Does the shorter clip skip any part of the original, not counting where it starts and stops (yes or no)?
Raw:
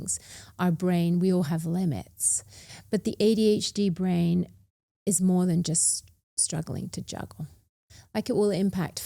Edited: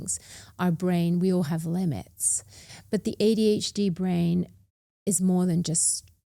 no